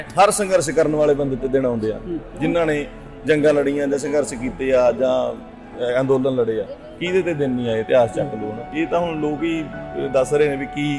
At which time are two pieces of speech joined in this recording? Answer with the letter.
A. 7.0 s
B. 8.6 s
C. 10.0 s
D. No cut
B